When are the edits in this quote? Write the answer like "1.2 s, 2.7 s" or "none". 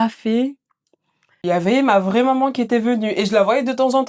1.4 s